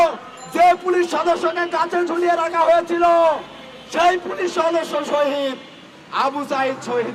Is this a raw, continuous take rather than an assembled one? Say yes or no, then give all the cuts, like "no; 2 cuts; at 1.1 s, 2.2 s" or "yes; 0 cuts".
yes; 0 cuts